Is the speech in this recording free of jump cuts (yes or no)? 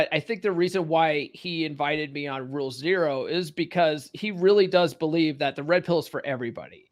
yes